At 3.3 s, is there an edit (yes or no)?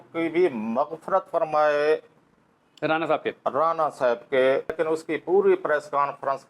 no